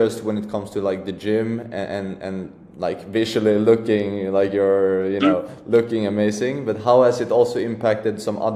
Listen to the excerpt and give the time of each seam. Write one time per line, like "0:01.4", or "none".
none